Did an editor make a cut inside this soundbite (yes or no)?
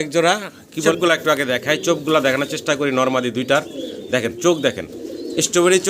yes